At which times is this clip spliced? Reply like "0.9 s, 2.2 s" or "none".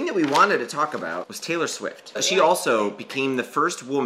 1.2 s